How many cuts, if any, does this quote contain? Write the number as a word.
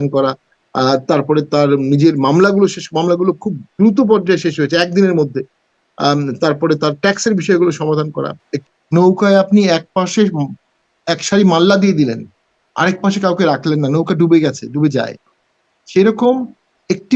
one